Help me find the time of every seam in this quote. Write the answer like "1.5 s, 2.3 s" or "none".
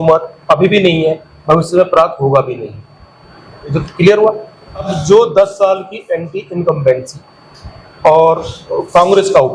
4.9 s